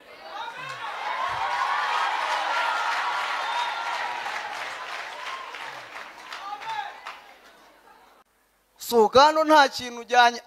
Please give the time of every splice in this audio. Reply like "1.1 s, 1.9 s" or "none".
8.2 s